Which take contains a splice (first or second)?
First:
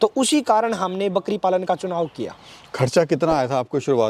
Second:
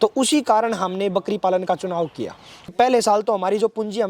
second